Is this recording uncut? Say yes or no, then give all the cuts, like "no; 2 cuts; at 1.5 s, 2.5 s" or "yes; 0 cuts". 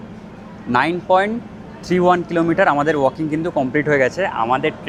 yes; 0 cuts